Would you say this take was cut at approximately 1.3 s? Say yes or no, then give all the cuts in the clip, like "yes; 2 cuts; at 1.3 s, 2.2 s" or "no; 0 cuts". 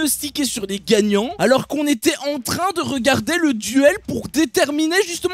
yes; 1 cut; at 1.3 s